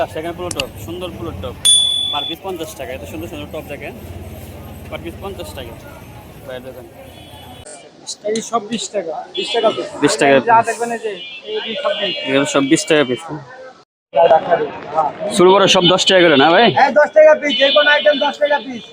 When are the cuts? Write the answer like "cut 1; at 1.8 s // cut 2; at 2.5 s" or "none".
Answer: cut 1; at 7.8 s // cut 2; at 14.0 s